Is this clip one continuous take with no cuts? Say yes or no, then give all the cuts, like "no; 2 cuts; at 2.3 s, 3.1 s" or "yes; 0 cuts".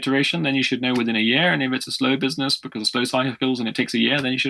yes; 0 cuts